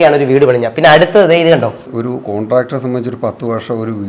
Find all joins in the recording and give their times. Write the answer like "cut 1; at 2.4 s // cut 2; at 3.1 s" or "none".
cut 1; at 1.7 s